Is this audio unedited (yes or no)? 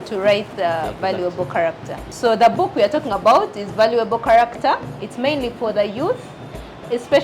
no